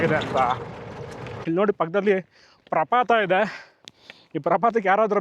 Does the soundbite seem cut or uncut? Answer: cut